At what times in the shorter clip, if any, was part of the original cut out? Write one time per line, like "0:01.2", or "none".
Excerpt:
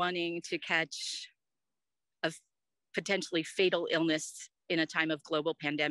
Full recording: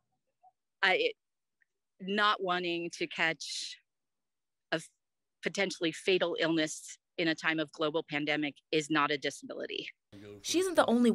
none

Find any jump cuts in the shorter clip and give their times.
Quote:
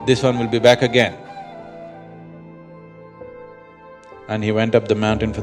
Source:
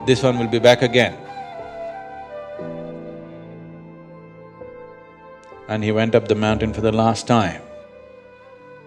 0:01.7

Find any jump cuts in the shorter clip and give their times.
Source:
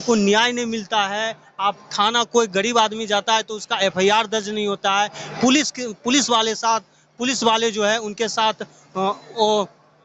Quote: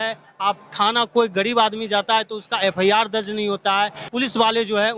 0:04.0

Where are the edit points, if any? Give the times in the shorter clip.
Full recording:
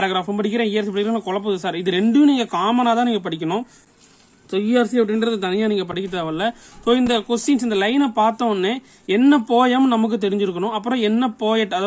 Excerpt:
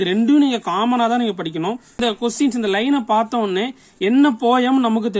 0:02.0

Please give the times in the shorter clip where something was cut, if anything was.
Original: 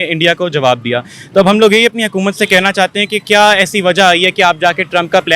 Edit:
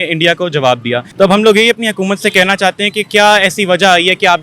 0:01.1

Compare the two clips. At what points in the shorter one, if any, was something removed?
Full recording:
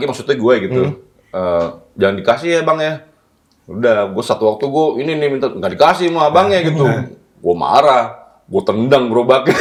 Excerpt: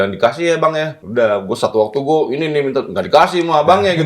0:01.0

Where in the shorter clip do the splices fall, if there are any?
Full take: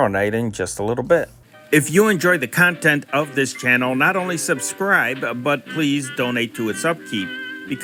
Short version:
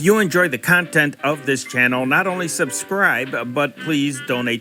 none

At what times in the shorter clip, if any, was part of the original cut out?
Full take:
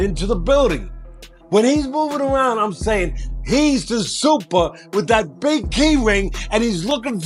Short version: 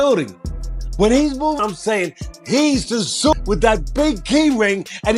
0:01.6
0:03.3

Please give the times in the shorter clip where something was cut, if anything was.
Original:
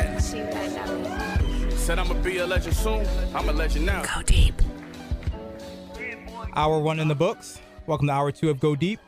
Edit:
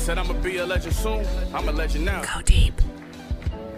none

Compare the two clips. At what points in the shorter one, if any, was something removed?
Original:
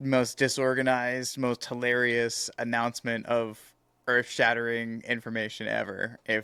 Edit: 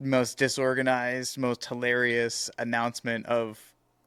none

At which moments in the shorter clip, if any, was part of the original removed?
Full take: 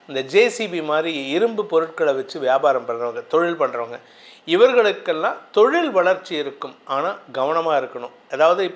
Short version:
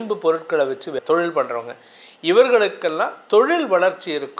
0:00.9

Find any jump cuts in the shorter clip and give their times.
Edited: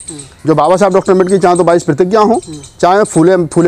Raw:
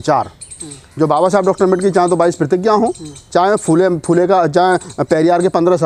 none

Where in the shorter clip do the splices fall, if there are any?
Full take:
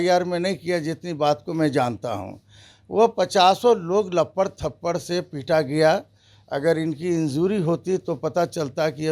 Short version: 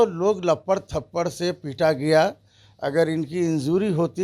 none

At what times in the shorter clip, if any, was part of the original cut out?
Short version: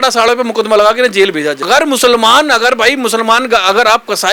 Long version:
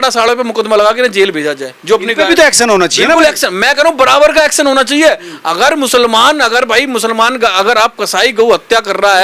0:01.6

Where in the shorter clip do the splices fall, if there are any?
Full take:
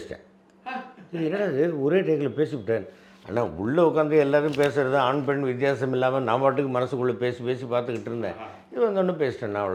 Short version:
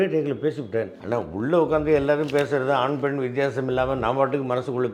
0:01.0

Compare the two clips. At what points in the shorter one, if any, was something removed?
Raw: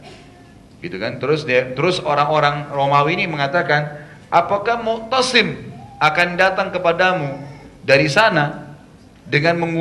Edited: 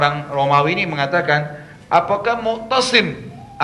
none

